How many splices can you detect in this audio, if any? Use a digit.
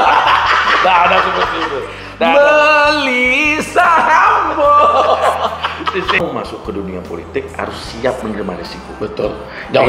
1